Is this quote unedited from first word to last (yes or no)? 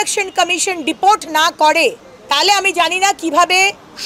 no